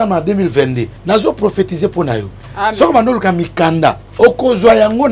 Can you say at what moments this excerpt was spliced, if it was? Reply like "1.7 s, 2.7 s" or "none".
0.9 s, 2.4 s, 4.1 s